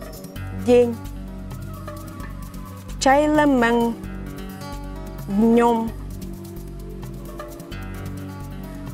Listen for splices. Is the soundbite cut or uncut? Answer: cut